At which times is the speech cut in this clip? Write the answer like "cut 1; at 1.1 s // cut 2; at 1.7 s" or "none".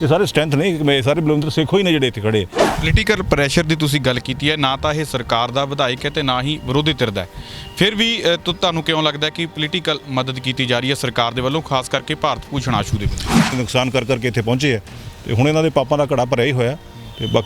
cut 1; at 2.6 s // cut 2; at 13.5 s